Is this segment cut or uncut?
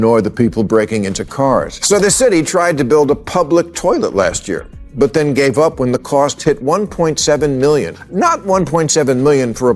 cut